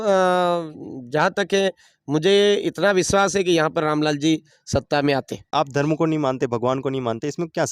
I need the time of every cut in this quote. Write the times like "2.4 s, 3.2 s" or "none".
5.5 s